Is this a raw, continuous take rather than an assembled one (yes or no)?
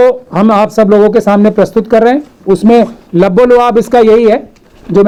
yes